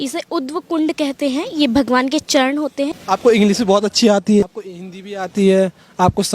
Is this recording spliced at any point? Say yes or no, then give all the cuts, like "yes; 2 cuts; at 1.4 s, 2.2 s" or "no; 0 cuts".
yes; 2 cuts; at 3.0 s, 4.4 s